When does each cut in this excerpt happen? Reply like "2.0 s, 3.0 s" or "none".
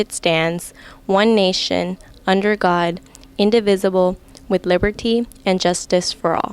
none